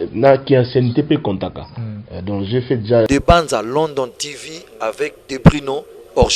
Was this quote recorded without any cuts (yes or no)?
no